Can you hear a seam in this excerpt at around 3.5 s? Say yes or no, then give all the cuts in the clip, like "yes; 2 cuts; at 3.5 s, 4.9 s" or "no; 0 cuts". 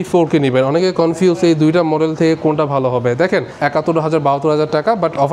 yes; 1 cut; at 3.5 s